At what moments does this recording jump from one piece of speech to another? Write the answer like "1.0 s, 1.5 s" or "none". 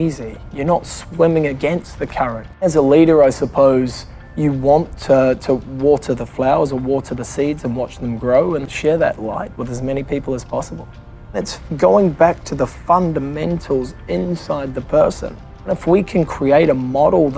2.6 s, 8.7 s, 11.5 s, 15.8 s